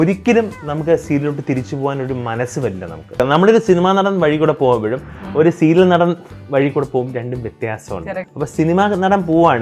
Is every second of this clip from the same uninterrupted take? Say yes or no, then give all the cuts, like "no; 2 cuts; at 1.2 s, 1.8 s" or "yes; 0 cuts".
no; 2 cuts; at 3.2 s, 8.3 s